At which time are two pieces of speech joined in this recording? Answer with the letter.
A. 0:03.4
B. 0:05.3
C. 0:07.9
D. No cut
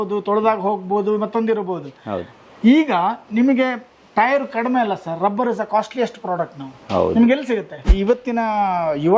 C